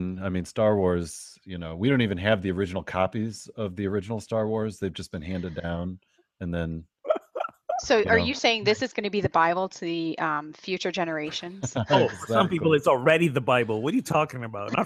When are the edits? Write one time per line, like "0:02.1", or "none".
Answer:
none

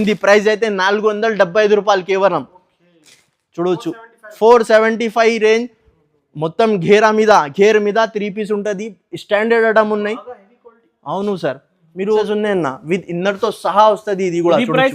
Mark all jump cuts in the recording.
0:12.2

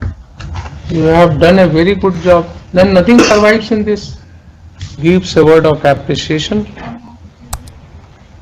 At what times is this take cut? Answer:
0:04.9

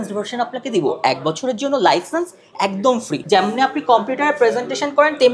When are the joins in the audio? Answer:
0:03.2

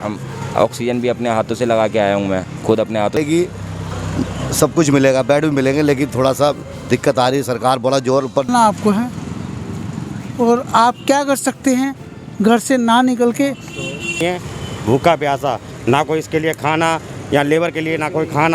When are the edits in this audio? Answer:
0:03.2
0:08.5
0:14.2

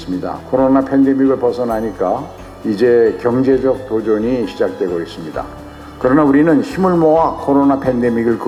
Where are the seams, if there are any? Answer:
none

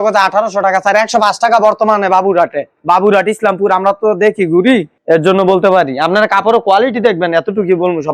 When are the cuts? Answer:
none

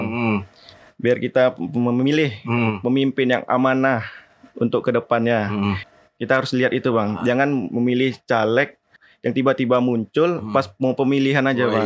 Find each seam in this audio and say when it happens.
0:05.9
0:09.0

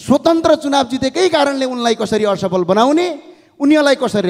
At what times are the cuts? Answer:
none

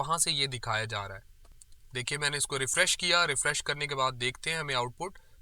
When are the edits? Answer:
0:01.6

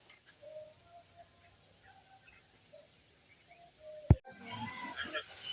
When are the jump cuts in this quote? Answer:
none

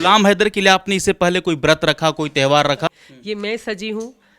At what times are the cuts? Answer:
0:02.9

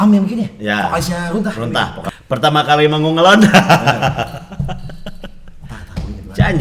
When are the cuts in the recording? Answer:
0:02.0

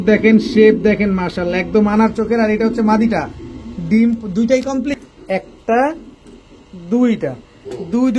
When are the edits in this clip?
0:04.9

